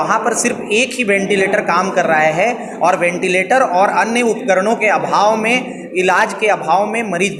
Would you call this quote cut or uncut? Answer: uncut